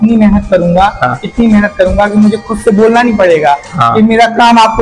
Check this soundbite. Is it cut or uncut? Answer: uncut